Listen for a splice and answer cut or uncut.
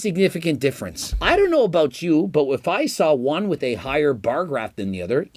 cut